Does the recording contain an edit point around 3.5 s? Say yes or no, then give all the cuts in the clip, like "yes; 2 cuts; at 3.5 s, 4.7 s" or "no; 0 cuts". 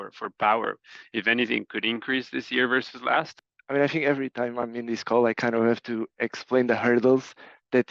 yes; 1 cut; at 3.5 s